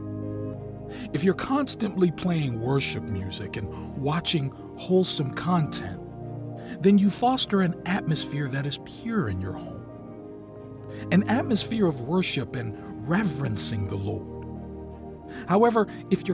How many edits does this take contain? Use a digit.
2